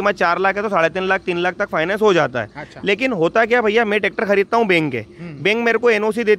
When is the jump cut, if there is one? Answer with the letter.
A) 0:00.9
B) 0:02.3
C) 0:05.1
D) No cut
D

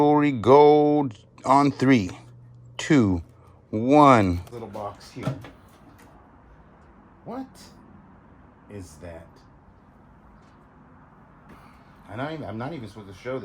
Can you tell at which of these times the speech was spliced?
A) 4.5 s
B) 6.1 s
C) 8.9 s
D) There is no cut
A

